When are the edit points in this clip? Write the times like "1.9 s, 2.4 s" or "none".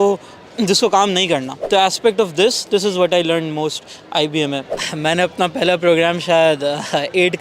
1.6 s, 4.7 s